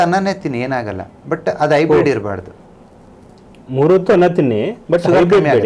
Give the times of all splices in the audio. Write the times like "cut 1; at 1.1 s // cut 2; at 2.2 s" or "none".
none